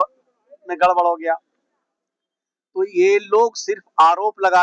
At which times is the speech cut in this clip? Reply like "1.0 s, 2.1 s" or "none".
none

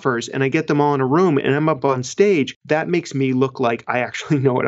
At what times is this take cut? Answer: none

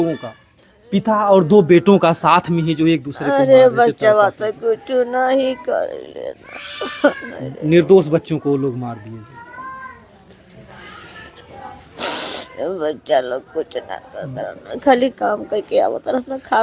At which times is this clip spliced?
none

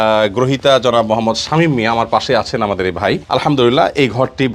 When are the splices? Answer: 3.2 s

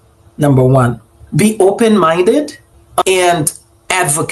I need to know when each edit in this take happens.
3.0 s

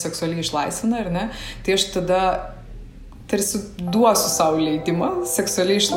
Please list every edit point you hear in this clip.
none

